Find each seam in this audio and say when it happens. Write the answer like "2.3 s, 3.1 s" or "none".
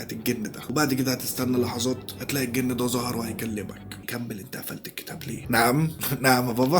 4.0 s